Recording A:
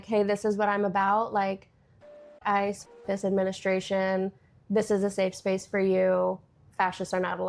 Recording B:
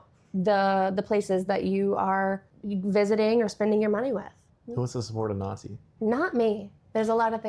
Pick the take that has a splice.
B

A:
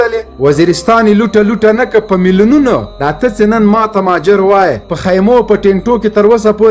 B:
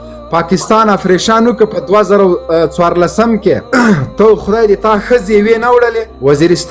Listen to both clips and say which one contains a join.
A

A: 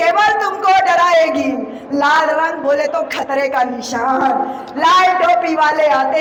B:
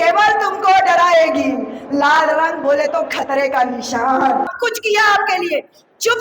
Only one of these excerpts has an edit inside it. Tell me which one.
B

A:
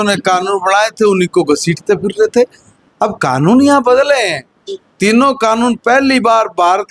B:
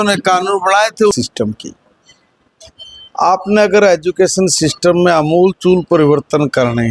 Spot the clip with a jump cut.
B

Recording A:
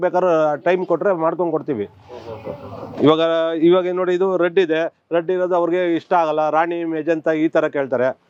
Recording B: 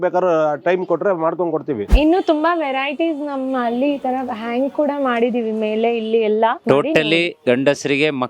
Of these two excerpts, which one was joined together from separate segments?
B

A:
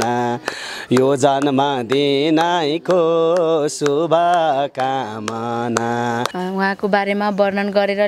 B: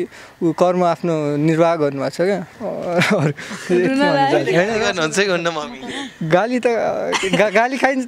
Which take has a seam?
A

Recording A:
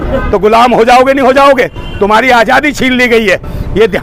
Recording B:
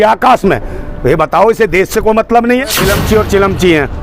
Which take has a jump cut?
B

